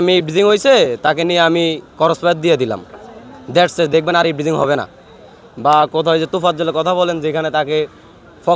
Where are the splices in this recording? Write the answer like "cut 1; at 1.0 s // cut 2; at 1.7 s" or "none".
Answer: none